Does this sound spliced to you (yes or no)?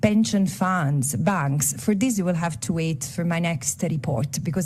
no